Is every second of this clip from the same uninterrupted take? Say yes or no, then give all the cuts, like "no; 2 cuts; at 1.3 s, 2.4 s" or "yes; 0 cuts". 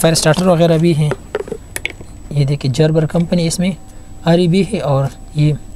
yes; 0 cuts